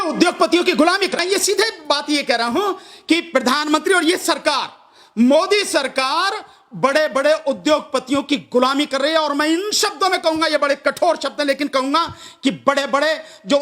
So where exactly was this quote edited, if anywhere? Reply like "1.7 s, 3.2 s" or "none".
1.2 s

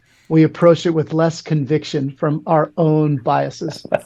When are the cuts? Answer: none

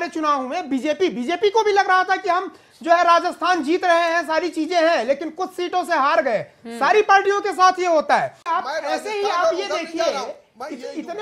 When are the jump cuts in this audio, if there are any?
8.4 s

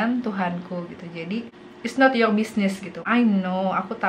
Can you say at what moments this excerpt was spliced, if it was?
1.6 s, 2.9 s

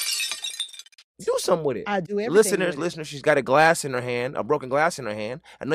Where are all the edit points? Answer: 1.2 s

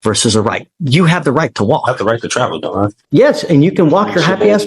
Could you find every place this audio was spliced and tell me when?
3.0 s

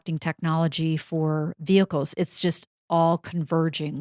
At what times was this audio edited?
none

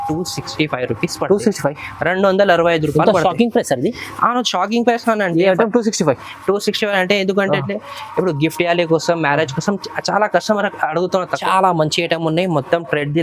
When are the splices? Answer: 11.3 s

